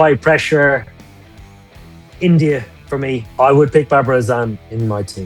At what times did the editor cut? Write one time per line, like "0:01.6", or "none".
0:03.2